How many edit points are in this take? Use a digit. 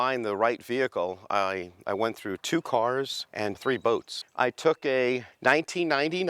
2